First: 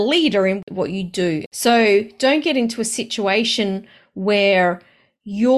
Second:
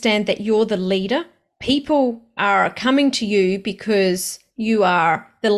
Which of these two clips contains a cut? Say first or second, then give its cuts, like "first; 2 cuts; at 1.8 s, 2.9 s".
first; 1 cut; at 1.5 s